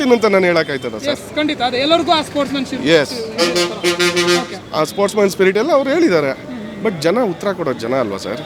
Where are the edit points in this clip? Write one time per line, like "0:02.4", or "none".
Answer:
none